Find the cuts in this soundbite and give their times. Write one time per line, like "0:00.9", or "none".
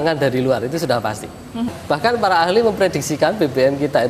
0:01.7